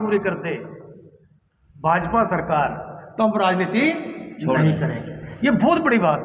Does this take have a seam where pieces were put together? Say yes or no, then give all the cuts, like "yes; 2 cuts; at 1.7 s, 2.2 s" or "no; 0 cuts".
no; 0 cuts